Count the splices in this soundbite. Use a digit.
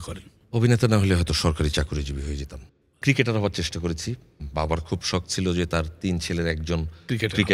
1